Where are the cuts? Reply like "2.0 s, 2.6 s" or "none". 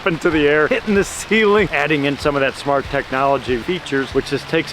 1.7 s, 3.6 s